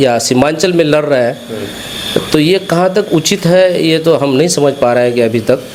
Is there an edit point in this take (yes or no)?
no